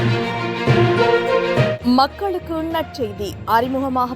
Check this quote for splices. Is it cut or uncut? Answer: cut